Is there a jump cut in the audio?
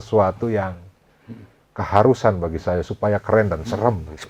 no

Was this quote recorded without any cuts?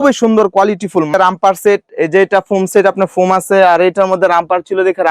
no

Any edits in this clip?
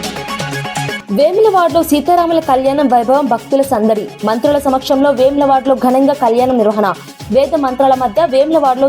yes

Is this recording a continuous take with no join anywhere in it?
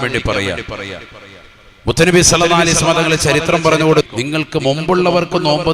no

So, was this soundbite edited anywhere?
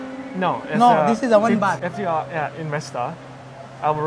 yes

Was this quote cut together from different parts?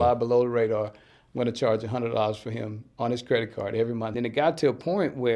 yes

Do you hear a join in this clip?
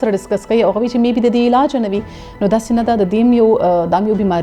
no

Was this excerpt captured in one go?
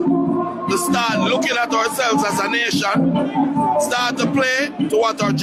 yes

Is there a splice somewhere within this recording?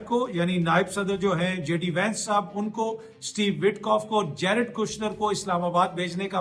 no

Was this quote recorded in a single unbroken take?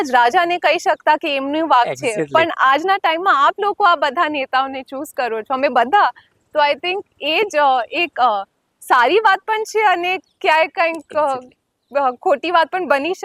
yes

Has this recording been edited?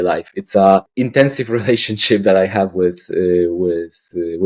yes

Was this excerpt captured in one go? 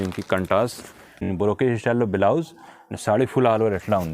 no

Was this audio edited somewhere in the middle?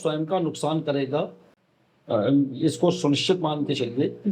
no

